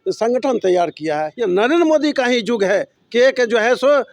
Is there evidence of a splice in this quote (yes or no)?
yes